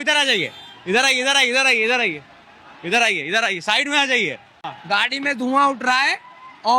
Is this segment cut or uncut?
cut